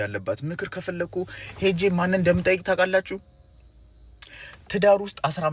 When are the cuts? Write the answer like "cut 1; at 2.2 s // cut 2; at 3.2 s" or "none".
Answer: none